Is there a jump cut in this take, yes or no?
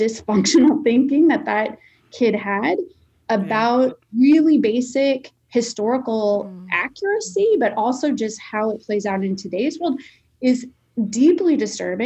no